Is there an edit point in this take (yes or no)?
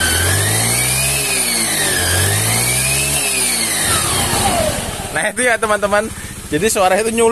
yes